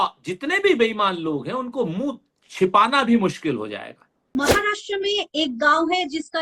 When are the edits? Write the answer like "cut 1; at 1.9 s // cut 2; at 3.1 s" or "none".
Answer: cut 1; at 4.2 s